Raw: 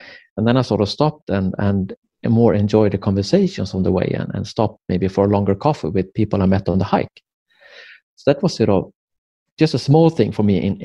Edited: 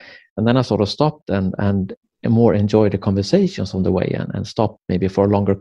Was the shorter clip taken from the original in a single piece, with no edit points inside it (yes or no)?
yes